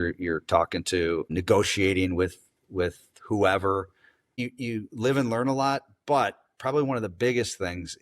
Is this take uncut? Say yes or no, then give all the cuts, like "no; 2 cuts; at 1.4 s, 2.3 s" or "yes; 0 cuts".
no; 2 cuts; at 1.3 s, 4.4 s